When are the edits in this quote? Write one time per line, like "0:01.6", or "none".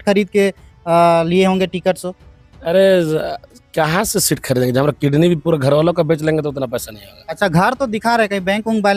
none